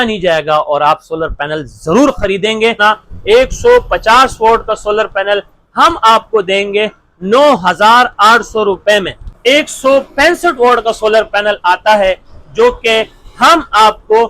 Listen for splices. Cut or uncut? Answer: cut